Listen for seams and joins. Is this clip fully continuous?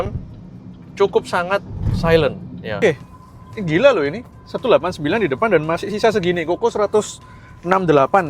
no; 1 cut; at 2.8 s

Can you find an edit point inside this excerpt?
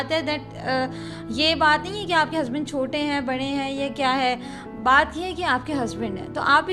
no; 0 cuts

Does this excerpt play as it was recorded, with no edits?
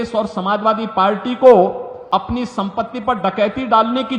no; 1 cut; at 1.9 s

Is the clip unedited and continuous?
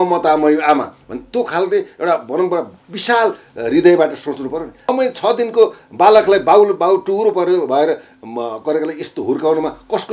no; 1 cut; at 4.9 s

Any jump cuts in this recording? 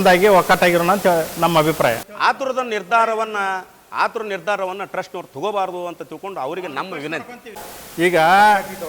yes; 2 cuts; at 2.1 s, 7.6 s

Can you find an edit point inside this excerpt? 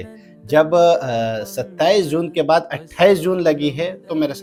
no; 0 cuts

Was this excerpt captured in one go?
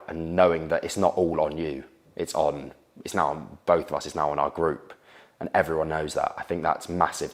yes; 0 cuts

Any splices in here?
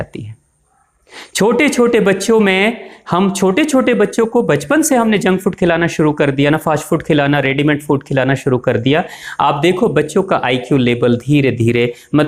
no; 0 cuts

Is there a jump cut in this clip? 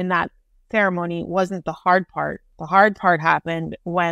yes; 1 cut; at 2.5 s

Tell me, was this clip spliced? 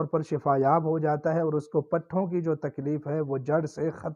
no; 0 cuts

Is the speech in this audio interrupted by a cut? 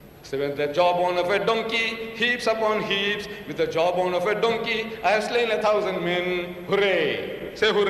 yes; 1 cut; at 5.2 s

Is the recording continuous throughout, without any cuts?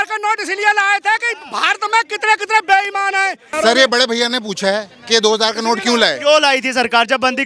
no; 1 cut; at 3.5 s

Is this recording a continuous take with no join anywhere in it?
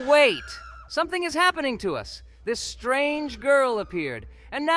yes; 0 cuts

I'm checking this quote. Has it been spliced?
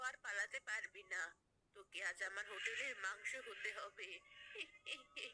no; 0 cuts

